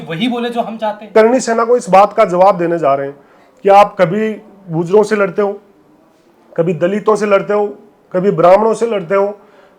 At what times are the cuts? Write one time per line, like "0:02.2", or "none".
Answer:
0:01.1